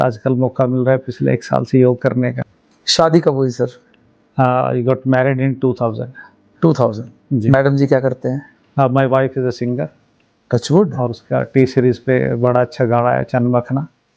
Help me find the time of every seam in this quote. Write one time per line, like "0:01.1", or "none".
0:02.4